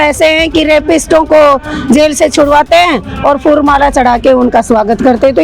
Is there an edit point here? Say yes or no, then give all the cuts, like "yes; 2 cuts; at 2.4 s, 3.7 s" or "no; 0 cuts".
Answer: no; 0 cuts